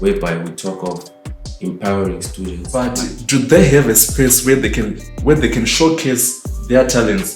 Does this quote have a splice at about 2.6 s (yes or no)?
yes